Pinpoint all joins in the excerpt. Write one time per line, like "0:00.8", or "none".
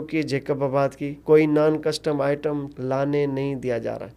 0:01.1